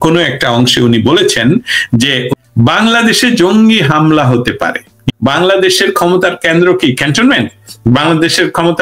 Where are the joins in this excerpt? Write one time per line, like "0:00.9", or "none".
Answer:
0:02.3
0:05.1